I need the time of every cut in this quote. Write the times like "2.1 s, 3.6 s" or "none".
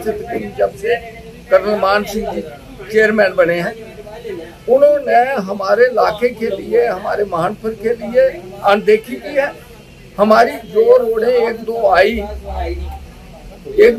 none